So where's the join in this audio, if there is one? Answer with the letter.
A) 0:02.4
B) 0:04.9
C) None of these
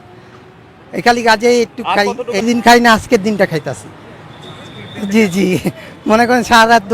A